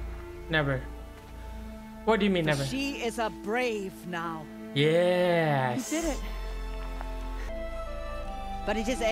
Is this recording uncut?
no; 1 cut; at 7.5 s

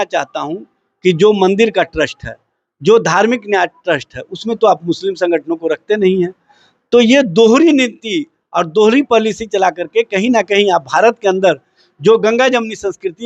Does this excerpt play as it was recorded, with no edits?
yes; 0 cuts

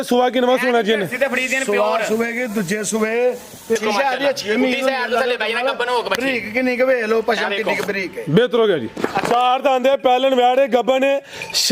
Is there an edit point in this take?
yes; 2 cuts; at 3.8 s, 8.9 s

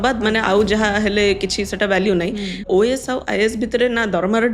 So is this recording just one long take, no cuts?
no; 1 cut; at 2.6 s

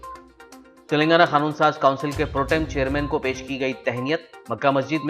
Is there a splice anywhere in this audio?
yes; 1 cut; at 0.9 s

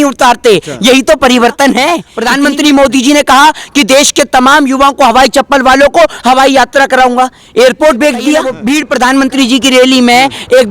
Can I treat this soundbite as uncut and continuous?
no; 2 cuts; at 2.1 s, 8.6 s

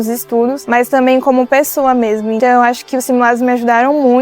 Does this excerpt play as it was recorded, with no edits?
no; 1 cut; at 2.4 s

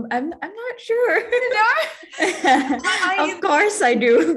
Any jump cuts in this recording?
no; 0 cuts

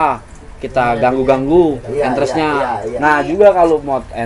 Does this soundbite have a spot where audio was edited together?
yes; 1 cut; at 2.8 s

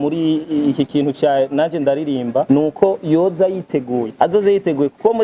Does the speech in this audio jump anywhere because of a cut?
yes; 2 cuts; at 2.5 s, 4.1 s

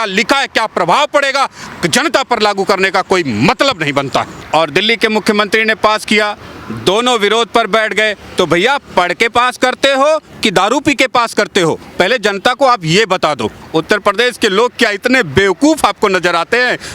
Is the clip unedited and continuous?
no; 2 cuts; at 4.4 s, 13.6 s

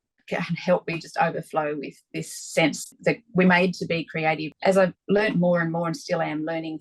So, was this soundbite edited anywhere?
yes; 2 cuts; at 2.9 s, 4.5 s

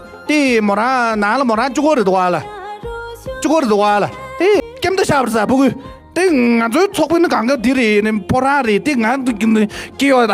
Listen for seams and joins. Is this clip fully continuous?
no; 1 cut; at 4.6 s

